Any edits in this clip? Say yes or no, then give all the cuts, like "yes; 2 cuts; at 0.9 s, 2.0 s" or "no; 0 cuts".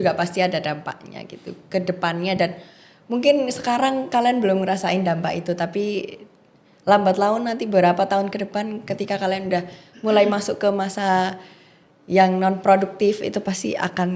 no; 0 cuts